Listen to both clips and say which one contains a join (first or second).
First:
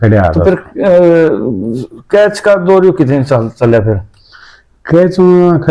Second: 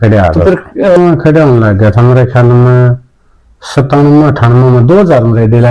second